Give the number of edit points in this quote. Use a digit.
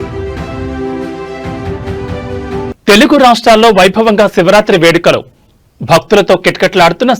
0